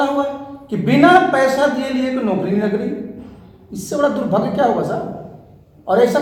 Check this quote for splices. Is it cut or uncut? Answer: uncut